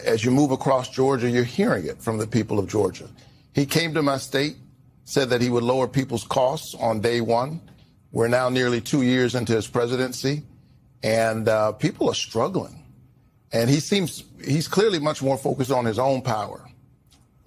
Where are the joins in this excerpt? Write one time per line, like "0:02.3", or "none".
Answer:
none